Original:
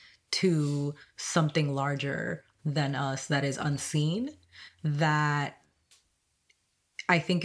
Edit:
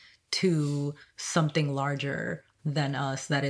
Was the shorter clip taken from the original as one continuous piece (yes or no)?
yes